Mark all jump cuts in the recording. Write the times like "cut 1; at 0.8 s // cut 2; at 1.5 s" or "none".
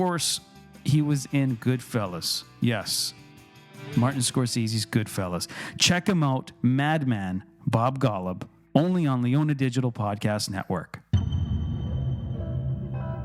cut 1; at 11.2 s

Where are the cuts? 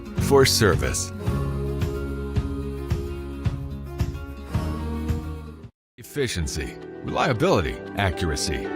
cut 1; at 6.1 s

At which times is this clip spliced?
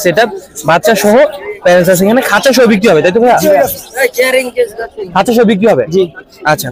none

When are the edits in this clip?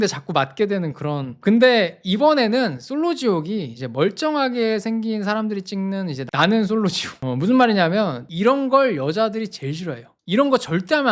cut 1; at 7.1 s // cut 2; at 8.2 s

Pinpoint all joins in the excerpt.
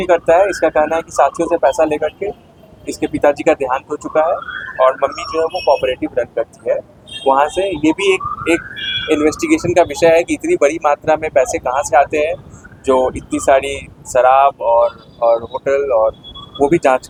none

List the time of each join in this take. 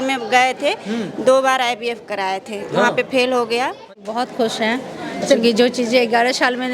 cut 1; at 3.9 s

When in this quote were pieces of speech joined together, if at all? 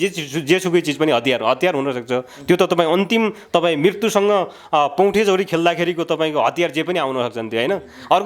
none

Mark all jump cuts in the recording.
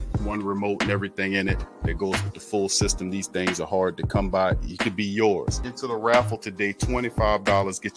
none

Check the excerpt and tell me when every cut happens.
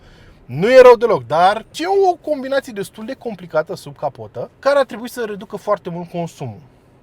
cut 1; at 1.7 s // cut 2; at 4.5 s

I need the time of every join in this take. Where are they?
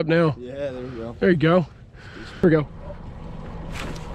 cut 1; at 2.4 s

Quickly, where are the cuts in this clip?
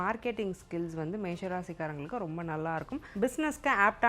cut 1; at 3.1 s

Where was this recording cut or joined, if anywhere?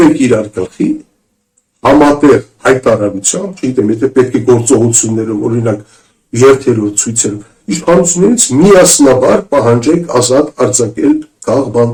none

